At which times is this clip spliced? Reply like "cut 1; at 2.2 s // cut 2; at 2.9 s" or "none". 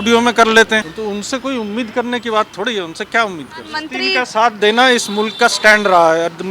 cut 1; at 0.9 s // cut 2; at 3.9 s